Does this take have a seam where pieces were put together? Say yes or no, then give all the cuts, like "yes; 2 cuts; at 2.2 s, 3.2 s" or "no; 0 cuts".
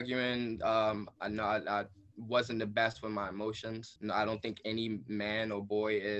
yes; 2 cuts; at 1.1 s, 3.9 s